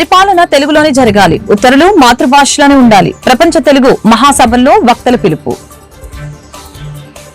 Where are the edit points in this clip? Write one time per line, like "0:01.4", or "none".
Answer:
none